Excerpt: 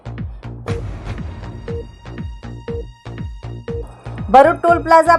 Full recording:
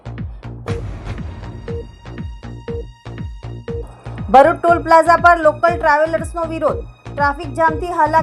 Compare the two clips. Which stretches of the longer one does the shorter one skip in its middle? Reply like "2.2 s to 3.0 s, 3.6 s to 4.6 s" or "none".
none